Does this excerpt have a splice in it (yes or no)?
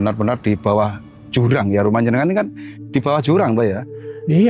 no